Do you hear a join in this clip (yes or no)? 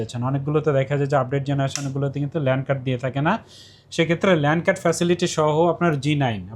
no